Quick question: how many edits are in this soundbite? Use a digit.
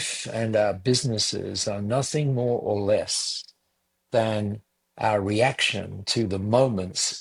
0